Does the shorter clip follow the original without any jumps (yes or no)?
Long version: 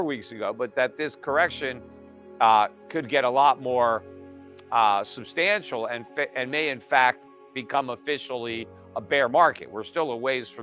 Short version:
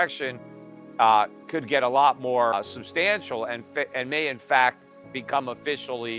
no